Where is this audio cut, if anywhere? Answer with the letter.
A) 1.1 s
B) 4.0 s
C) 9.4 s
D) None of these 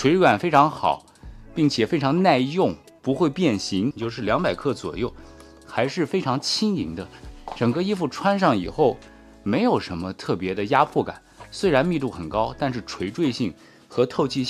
B